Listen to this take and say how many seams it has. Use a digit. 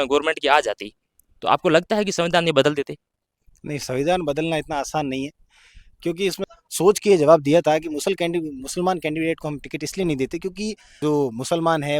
2